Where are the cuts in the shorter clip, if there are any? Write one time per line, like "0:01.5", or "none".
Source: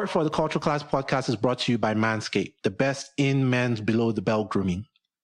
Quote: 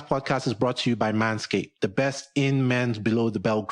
none

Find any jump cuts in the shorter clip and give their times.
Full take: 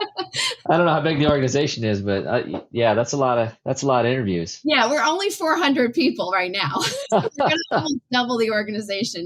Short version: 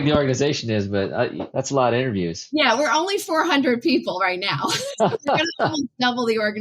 0:01.5

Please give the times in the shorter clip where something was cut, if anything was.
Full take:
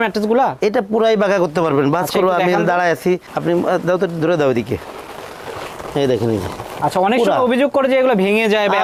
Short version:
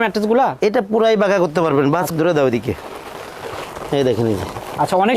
0:02.1

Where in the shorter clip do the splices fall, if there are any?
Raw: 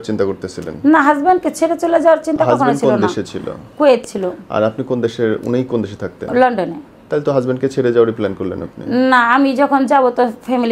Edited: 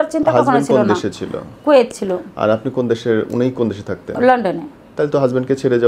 none

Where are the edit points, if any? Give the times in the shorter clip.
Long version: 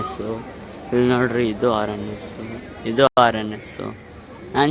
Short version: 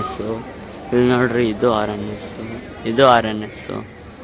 0:03.1

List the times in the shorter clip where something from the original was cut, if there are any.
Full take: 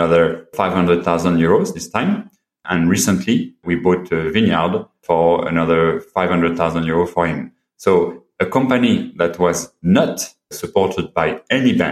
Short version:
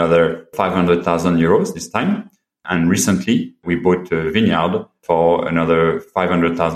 none

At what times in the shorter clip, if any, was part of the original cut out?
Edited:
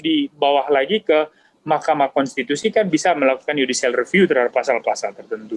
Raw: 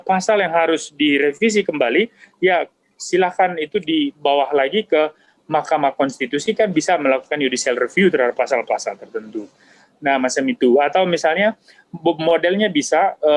none

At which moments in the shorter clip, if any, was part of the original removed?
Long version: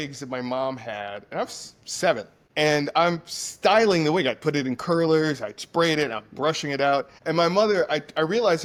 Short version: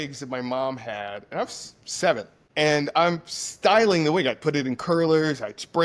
none

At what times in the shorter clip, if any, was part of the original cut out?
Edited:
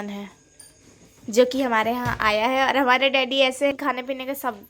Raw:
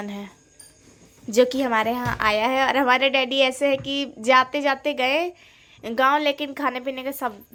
0:03.7

